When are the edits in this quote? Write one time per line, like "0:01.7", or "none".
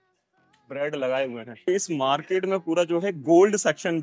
0:01.7